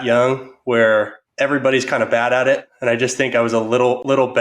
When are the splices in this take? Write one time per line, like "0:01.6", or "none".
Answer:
0:01.2
0:02.7